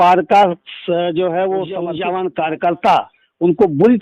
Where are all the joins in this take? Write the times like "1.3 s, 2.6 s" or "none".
1.9 s